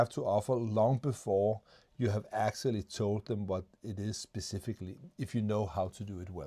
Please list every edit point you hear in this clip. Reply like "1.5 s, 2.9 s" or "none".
none